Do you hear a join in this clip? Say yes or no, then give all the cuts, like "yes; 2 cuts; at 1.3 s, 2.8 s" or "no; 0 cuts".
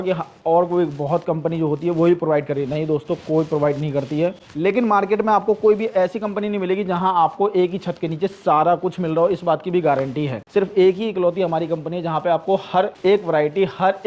yes; 3 cuts; at 4.5 s, 10.4 s, 12.9 s